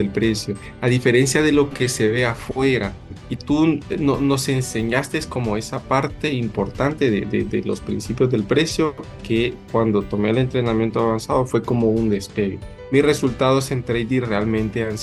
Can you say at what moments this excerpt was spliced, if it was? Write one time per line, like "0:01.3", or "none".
none